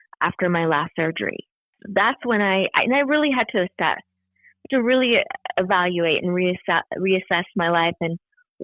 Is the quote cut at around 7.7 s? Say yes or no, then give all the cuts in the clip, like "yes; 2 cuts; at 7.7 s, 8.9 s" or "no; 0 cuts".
no; 0 cuts